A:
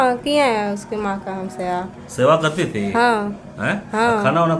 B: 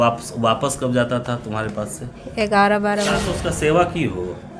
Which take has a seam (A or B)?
B